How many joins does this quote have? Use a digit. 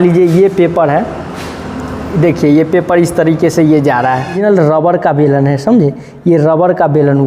1